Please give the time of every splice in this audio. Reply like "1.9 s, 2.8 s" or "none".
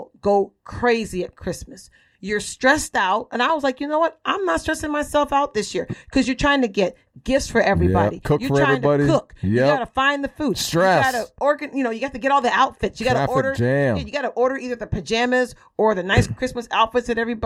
none